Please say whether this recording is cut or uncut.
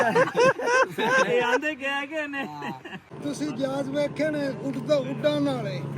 cut